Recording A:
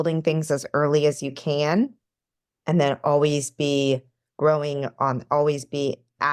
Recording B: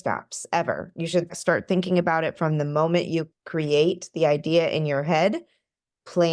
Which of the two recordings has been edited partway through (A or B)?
B